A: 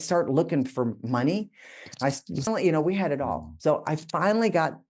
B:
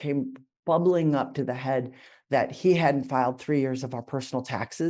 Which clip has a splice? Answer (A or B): A